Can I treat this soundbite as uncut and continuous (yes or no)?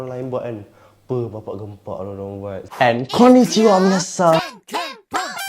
no